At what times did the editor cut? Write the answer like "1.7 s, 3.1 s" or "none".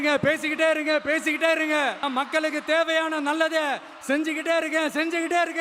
none